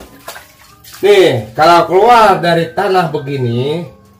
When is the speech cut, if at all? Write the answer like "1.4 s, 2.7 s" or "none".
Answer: none